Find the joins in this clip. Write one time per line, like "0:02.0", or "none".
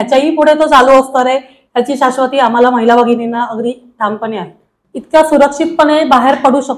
0:04.6